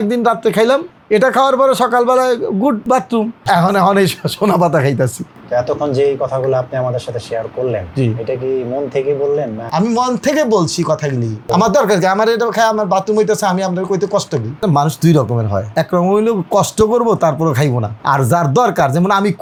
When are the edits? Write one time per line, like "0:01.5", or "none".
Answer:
none